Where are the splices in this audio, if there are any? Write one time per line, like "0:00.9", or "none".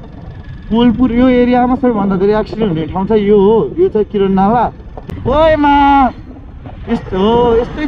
0:04.9